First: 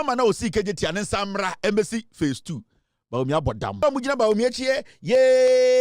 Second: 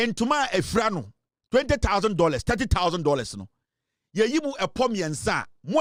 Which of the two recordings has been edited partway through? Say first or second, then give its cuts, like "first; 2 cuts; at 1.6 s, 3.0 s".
first; 1 cut; at 3.8 s